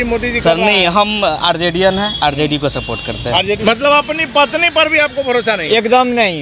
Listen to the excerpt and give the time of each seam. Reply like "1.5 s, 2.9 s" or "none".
3.6 s